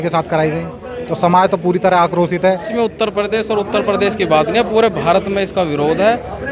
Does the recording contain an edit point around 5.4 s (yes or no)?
no